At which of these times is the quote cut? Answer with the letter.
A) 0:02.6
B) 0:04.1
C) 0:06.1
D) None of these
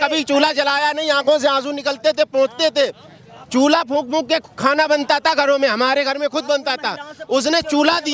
D